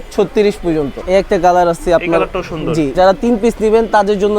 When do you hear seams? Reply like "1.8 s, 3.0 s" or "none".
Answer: 1.0 s, 2.9 s